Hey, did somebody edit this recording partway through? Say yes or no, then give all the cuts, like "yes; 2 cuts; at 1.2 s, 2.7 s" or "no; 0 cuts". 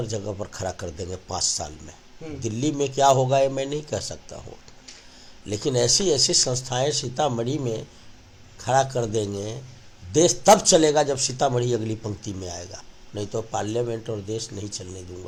no; 0 cuts